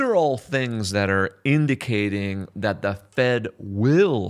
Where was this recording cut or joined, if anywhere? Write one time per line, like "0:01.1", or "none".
none

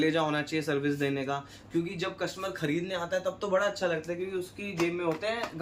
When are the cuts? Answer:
none

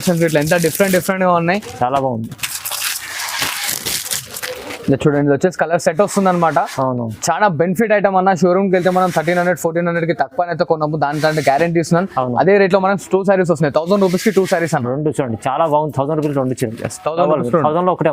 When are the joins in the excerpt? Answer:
none

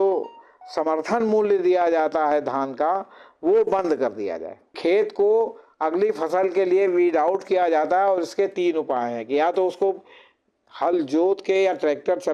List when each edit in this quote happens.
0:04.8

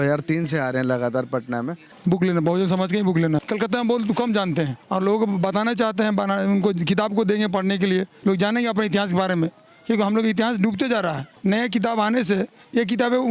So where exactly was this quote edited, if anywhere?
0:01.8
0:03.4
0:04.8
0:08.1
0:11.3

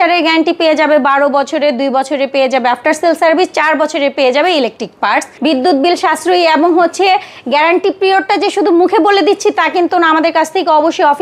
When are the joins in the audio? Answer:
0:05.4

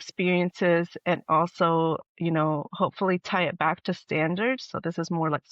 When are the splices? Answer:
none

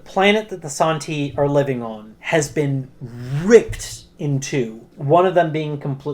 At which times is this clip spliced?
0:02.1

